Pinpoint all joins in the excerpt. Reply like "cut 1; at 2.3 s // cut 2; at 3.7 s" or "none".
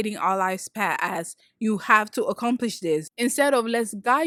none